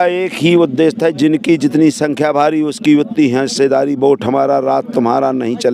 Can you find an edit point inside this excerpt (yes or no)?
no